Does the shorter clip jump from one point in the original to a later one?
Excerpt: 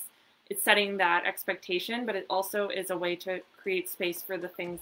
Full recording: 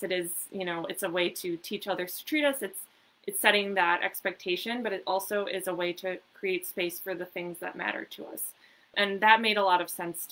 no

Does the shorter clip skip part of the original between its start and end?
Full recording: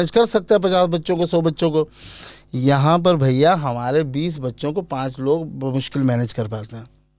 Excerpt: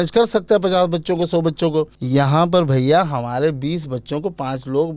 yes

